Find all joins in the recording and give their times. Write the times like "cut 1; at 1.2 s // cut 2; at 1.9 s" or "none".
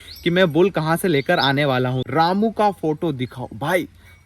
cut 1; at 2.0 s